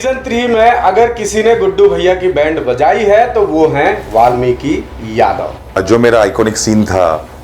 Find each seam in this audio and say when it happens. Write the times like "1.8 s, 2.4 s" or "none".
5.8 s